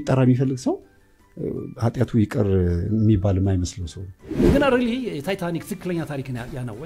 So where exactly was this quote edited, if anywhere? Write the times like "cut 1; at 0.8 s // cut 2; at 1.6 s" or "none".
cut 1; at 4.4 s